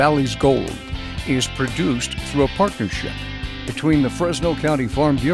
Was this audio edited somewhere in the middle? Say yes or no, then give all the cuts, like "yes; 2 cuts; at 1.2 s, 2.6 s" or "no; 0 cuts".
no; 0 cuts